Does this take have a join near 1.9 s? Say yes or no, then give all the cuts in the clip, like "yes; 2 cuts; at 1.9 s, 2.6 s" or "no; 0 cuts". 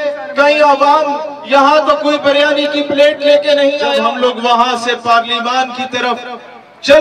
no; 1 cut; at 3.9 s